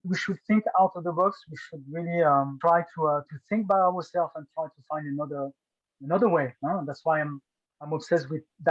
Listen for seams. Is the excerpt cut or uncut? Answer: uncut